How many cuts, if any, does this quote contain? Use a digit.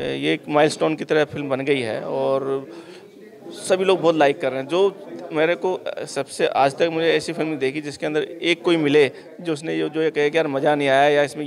0